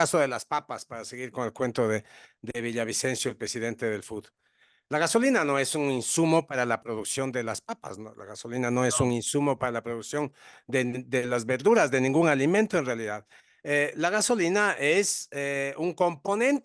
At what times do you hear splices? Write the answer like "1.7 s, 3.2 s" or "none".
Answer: none

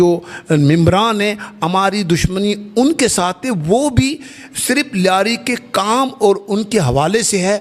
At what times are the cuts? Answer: none

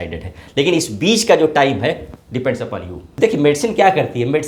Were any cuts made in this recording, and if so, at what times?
3.1 s

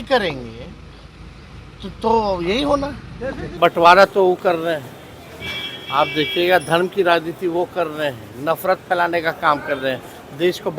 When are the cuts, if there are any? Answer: 3.5 s

